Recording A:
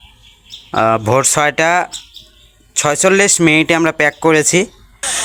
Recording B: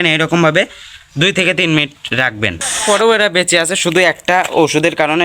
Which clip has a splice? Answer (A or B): B